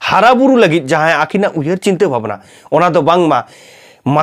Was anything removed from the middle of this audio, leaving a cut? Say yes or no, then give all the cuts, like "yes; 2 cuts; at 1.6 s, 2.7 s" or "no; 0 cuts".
no; 0 cuts